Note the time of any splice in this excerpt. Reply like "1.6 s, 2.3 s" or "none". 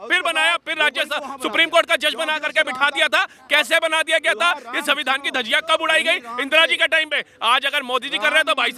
none